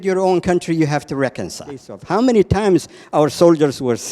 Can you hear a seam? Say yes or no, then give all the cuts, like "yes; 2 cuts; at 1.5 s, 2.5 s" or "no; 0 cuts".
yes; 1 cut; at 1.9 s